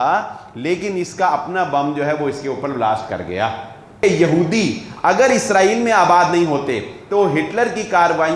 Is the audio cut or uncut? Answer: cut